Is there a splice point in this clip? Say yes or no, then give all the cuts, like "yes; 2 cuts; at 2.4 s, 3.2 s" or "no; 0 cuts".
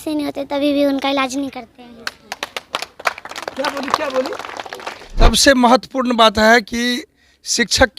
yes; 1 cut; at 5.2 s